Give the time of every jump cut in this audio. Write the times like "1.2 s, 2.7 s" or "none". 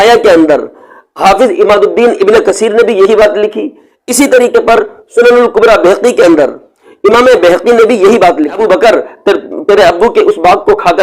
8.6 s